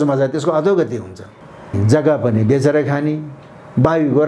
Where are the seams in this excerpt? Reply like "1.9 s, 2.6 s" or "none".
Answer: 1.7 s